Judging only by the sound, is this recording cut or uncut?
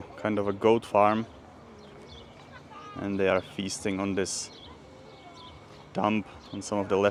uncut